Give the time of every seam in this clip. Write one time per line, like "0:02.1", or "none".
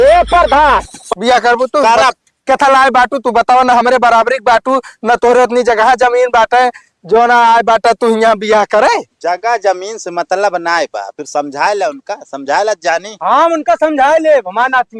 0:00.9